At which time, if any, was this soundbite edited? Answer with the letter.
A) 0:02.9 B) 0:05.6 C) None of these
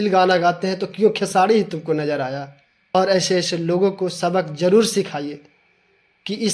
A